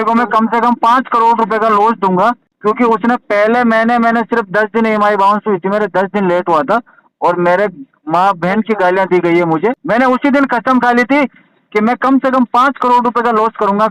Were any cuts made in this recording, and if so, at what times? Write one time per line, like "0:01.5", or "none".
0:02.5
0:09.8